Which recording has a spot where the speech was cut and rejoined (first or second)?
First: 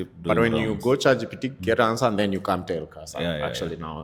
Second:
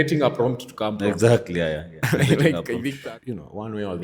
second